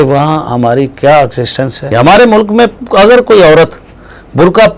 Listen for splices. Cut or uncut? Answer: cut